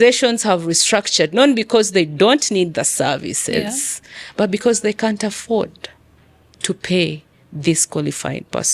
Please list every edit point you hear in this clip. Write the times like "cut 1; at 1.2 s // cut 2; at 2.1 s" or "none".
none